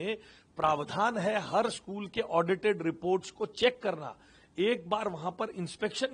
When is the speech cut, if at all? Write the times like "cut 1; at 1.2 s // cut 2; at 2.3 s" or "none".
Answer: none